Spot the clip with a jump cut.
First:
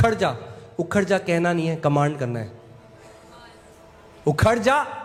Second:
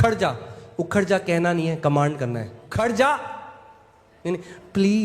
second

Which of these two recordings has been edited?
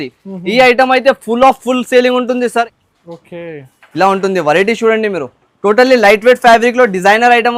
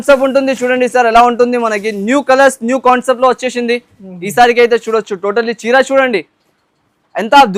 first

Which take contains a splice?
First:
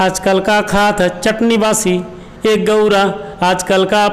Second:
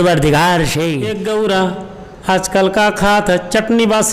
second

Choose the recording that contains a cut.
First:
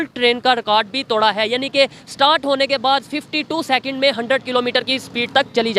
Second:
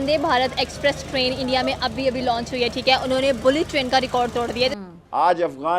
second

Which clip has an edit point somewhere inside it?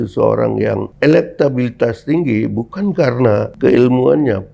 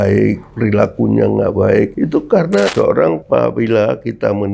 second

